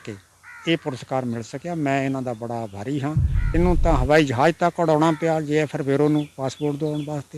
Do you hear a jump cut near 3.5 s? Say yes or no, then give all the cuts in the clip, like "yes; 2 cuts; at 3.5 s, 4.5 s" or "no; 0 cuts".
yes; 1 cut; at 3.5 s